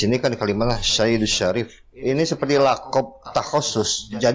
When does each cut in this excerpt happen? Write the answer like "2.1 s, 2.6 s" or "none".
1.8 s